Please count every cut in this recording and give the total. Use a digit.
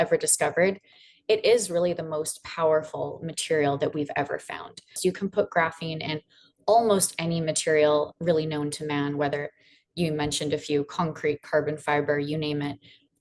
2